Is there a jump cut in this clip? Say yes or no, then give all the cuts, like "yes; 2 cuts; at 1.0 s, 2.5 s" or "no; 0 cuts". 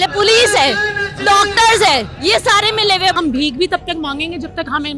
yes; 1 cut; at 3.2 s